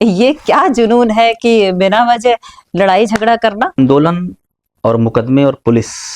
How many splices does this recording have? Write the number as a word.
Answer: one